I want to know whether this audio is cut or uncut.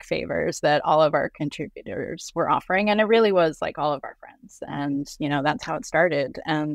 cut